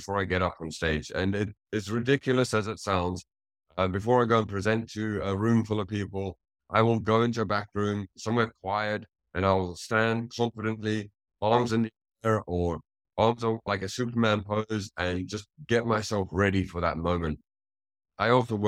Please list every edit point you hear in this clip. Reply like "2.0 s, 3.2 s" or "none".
none